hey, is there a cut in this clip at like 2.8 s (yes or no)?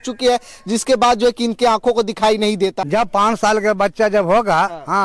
yes